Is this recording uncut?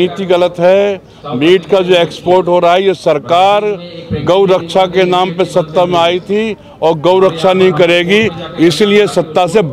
yes; 0 cuts

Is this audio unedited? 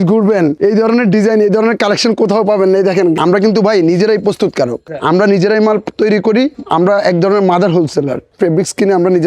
no; 4 cuts; at 3.2 s, 4.9 s, 6.6 s, 8.3 s

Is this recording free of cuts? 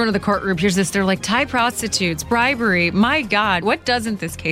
no; 1 cut; at 3.6 s

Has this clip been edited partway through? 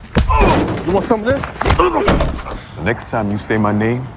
no; 0 cuts

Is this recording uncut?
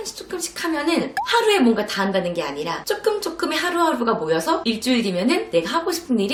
yes; 0 cuts

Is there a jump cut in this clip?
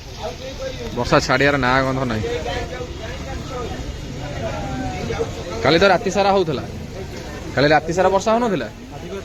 no; 0 cuts

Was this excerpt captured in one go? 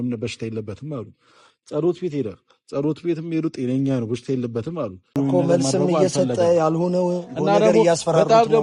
no; 1 cut; at 5.1 s

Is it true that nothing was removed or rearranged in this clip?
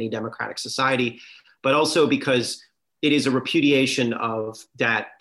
yes; 0 cuts

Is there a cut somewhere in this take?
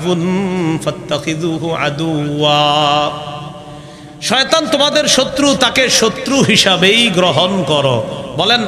no; 0 cuts

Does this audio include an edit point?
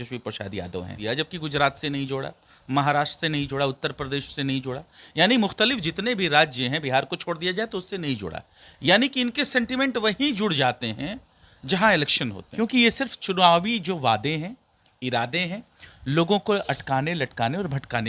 yes; 2 cuts; at 1.0 s, 12.4 s

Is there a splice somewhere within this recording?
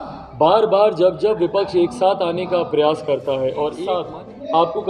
yes; 1 cut; at 4.0 s

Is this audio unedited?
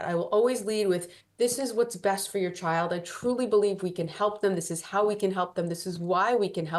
yes; 0 cuts

